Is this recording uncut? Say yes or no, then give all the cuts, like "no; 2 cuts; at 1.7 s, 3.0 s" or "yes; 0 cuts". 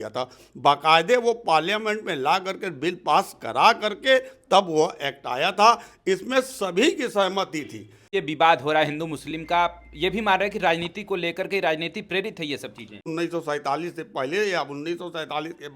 no; 2 cuts; at 8.1 s, 13.1 s